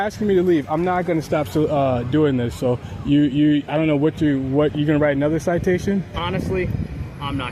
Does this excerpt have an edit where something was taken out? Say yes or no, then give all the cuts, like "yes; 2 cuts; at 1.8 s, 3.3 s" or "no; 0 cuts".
no; 0 cuts